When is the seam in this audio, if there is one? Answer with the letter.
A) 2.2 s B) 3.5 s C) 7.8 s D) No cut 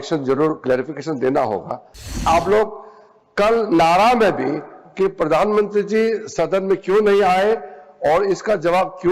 A